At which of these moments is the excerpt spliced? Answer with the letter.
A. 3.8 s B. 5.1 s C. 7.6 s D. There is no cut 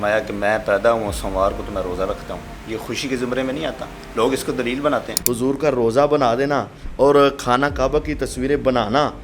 B